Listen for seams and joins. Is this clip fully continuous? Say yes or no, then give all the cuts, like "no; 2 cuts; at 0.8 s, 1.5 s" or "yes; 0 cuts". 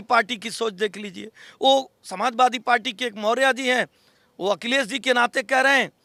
yes; 0 cuts